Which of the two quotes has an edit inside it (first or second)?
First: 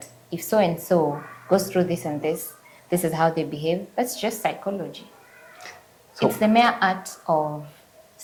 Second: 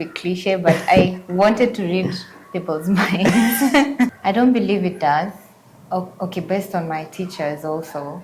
second